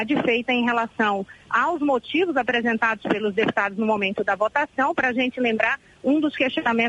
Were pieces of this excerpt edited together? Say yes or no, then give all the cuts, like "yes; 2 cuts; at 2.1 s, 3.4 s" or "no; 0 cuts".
yes; 1 cut; at 2.3 s